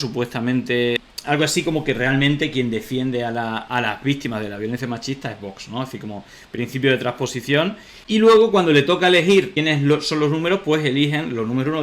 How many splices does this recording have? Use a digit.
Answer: 1